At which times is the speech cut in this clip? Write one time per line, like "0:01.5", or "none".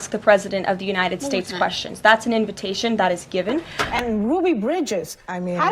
0:03.8